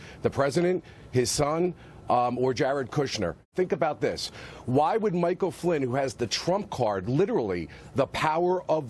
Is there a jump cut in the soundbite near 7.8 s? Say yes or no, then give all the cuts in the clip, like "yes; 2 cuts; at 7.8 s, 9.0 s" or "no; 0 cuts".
no; 1 cut; at 3.4 s